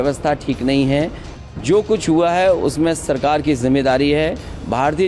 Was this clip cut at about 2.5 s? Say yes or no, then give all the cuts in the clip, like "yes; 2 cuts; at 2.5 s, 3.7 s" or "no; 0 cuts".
no; 1 cut; at 1.2 s